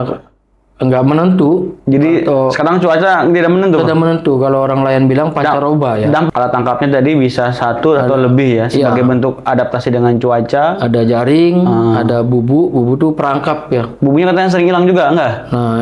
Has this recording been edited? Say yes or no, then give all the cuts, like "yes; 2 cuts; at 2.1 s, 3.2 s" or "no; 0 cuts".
yes; 1 cut; at 6.3 s